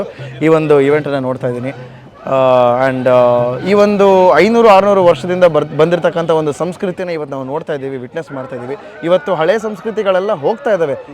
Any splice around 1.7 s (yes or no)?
no